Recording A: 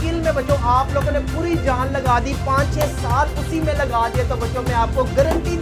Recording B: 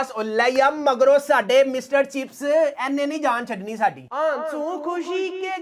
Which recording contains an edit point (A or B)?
B